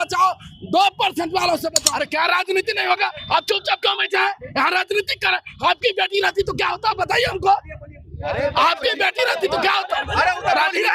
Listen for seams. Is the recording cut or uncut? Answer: cut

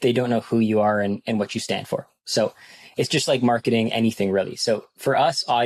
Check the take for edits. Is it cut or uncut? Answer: uncut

